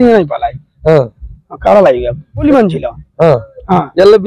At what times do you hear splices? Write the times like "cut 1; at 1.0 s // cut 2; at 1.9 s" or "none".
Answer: cut 1; at 2.4 s